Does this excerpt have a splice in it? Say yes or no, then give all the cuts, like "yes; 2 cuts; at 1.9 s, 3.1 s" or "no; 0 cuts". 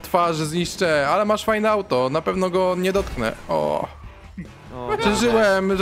no; 0 cuts